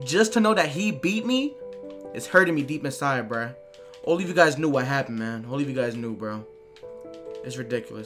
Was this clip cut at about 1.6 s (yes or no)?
no